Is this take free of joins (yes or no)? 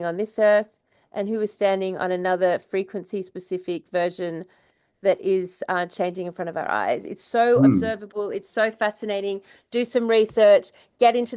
yes